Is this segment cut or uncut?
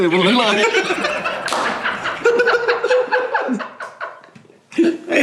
uncut